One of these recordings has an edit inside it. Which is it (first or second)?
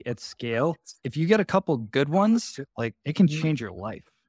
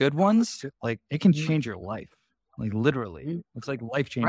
first